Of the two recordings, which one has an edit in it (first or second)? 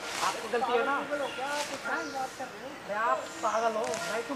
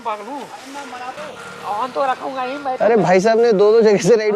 second